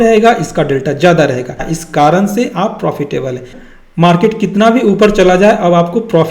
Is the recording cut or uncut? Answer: cut